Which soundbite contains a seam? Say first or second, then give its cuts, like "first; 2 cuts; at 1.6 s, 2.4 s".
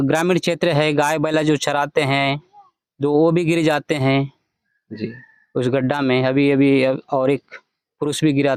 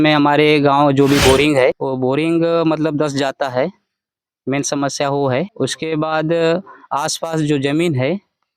second; 2 cuts; at 1.9 s, 5.5 s